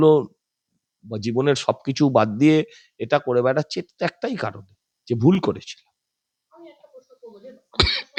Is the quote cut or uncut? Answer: uncut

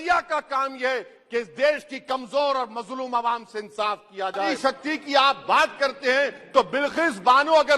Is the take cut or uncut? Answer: cut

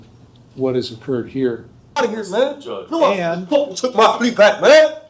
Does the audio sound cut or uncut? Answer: cut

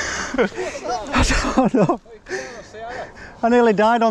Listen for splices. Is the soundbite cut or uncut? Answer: uncut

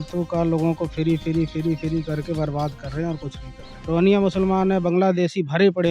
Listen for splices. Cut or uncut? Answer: cut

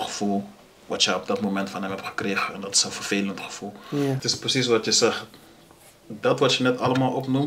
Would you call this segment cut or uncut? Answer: cut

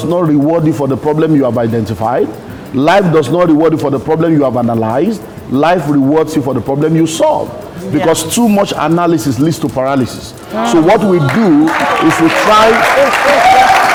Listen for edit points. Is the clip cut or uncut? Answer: uncut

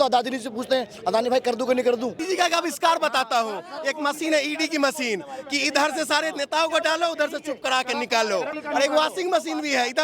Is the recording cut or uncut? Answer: cut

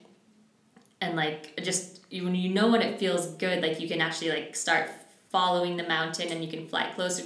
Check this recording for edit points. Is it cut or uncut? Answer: uncut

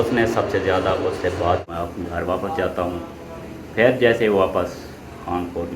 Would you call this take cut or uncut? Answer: cut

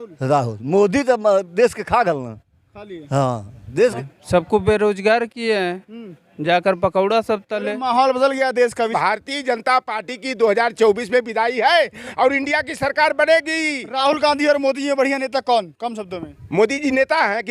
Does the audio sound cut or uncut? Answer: cut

